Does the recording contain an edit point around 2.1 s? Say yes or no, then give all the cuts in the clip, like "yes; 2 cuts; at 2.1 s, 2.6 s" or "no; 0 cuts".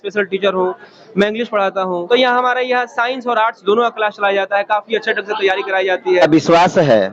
yes; 2 cuts; at 2.1 s, 6.2 s